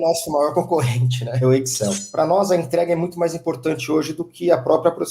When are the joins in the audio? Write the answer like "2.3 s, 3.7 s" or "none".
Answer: 2.0 s

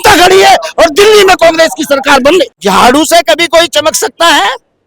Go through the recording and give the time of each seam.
2.5 s

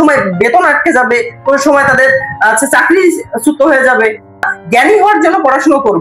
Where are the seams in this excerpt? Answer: 4.5 s

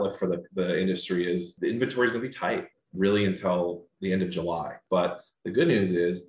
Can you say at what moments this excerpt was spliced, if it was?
1.5 s, 2.8 s, 4.8 s

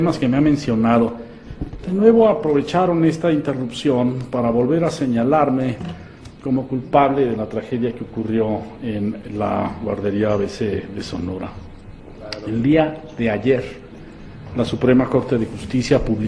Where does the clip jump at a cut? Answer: none

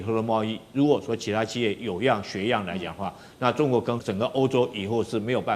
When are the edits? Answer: 4.0 s

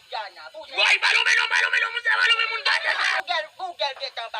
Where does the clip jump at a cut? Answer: 3.1 s

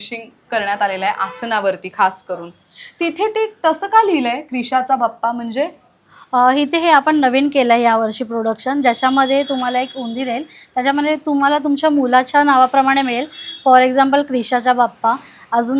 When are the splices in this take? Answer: none

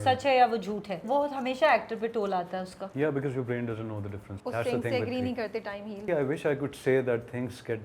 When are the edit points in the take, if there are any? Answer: 1.0 s, 2.8 s, 4.2 s, 6.0 s

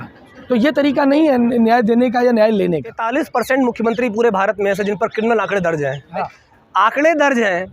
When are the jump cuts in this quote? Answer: 3.0 s

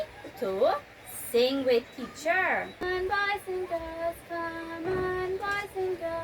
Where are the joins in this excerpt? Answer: 2.8 s

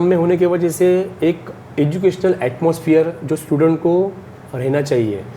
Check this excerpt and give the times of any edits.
none

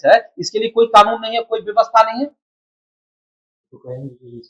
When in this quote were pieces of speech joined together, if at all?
none

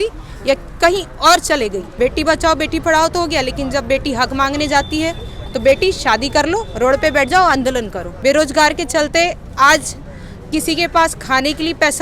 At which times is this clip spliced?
1.8 s, 8.0 s

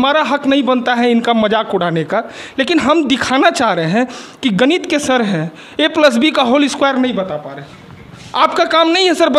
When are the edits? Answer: 7.4 s

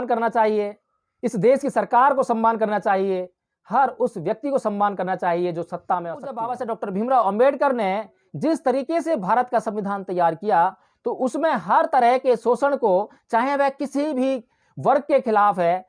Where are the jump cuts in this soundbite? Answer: 6.6 s

